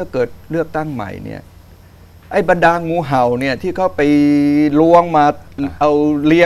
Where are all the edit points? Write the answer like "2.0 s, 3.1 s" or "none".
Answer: none